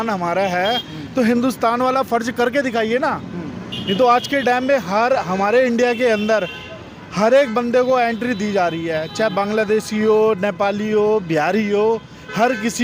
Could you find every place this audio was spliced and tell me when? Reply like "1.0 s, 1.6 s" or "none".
none